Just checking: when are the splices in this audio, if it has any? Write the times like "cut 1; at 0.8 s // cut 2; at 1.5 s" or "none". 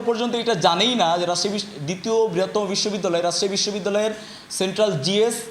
none